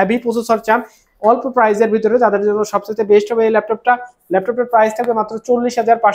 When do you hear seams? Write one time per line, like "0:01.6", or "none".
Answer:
none